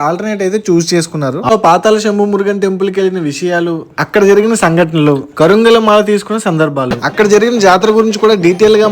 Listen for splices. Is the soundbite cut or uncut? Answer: cut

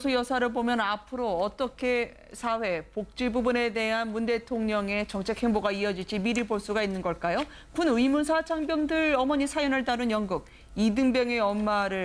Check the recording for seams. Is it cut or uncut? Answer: uncut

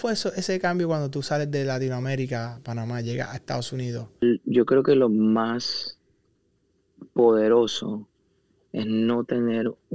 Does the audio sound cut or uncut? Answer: cut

